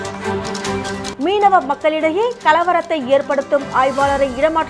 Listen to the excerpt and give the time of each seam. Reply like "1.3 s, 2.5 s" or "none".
1.0 s